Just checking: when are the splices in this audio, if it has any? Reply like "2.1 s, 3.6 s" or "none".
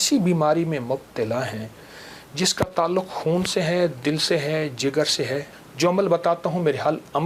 5.6 s